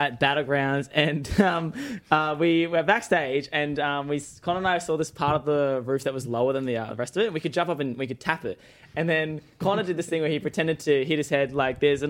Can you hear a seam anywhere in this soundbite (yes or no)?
no